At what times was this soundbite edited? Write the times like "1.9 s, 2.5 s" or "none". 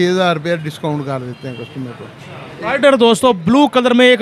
none